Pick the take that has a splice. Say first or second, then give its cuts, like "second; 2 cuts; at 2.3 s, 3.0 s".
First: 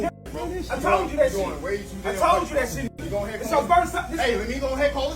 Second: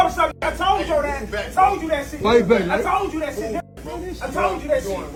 first; 1 cut; at 2.9 s